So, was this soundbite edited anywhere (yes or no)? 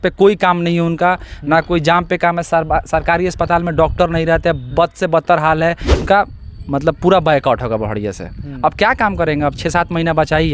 yes